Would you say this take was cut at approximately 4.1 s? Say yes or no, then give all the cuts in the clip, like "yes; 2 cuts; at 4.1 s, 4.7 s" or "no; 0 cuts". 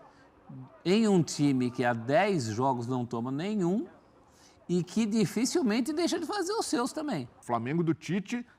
no; 1 cut; at 7.3 s